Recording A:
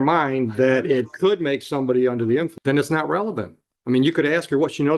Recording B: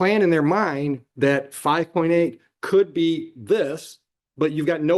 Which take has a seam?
A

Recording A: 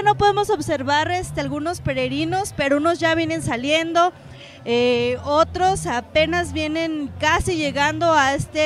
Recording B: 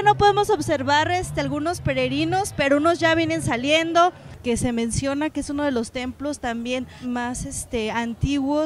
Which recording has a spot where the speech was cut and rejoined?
B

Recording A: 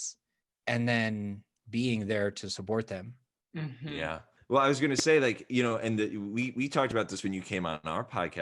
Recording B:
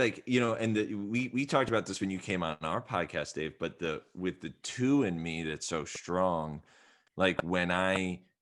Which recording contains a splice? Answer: A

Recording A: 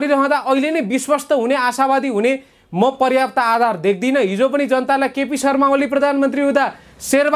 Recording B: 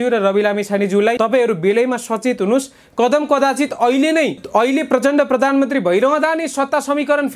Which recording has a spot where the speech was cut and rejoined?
B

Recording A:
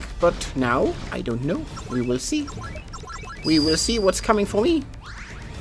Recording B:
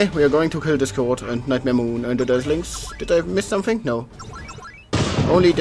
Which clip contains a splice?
A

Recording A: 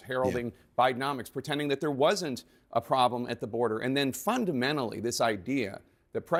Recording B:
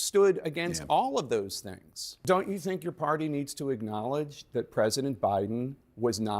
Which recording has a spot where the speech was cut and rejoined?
B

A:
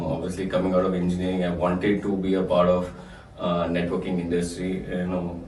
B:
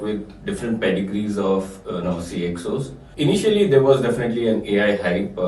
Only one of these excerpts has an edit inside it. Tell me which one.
B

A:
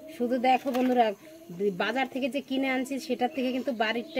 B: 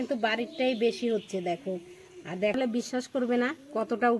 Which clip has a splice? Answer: B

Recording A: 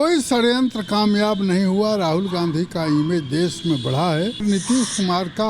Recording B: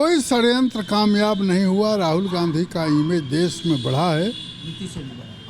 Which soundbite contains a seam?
A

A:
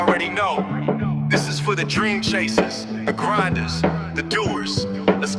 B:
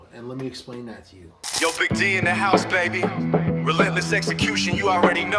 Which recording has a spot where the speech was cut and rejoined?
B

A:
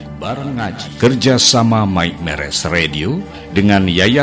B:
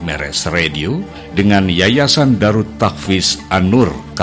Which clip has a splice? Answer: A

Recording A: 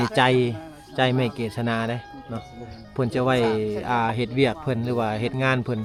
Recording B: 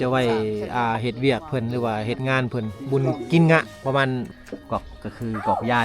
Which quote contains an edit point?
B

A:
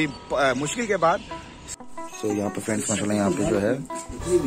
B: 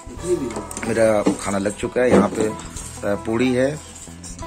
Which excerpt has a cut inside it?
A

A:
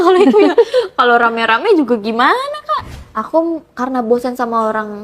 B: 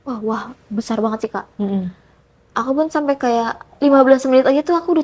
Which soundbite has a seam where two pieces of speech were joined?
A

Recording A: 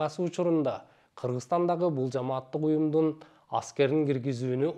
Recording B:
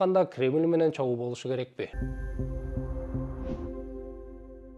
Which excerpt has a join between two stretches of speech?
B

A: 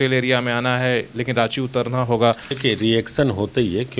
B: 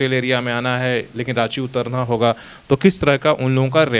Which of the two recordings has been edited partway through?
A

